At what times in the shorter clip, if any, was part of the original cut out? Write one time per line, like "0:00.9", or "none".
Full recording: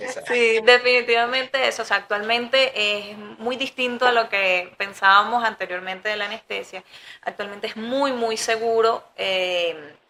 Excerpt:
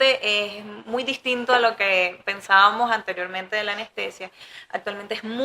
none